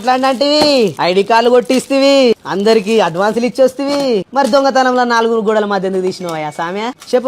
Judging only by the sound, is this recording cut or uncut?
cut